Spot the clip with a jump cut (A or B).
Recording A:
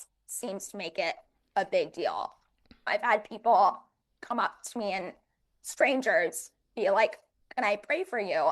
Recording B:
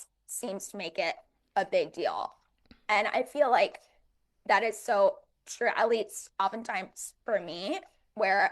A